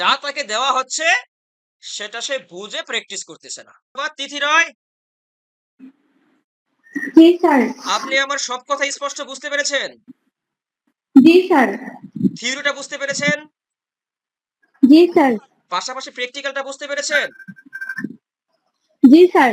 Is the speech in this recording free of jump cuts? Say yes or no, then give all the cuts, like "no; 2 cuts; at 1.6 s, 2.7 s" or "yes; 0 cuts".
no; 1 cut; at 3.9 s